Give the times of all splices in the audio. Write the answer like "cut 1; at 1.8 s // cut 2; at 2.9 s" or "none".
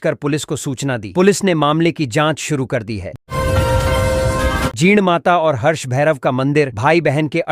none